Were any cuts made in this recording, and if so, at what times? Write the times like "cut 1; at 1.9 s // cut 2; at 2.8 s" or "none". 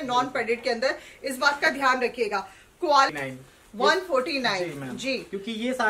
cut 1; at 3.1 s